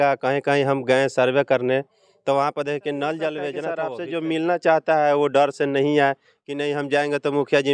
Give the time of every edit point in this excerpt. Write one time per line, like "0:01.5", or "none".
0:03.8